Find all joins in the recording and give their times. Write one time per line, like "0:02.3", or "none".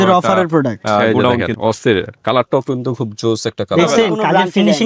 none